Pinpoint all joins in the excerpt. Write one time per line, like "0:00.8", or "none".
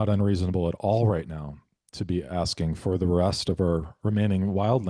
none